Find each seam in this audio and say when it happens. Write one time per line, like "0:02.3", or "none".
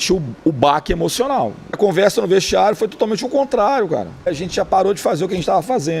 0:01.8
0:04.3